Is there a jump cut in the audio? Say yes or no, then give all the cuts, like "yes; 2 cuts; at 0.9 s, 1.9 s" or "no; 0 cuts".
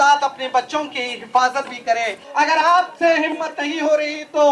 yes; 1 cut; at 2.2 s